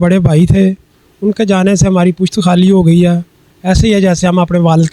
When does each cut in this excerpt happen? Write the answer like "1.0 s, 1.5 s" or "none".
none